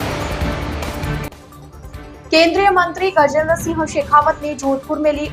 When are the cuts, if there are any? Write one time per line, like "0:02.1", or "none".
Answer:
none